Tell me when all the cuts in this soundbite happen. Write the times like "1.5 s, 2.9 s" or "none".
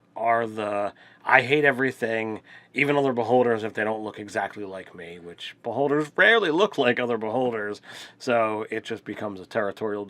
6.1 s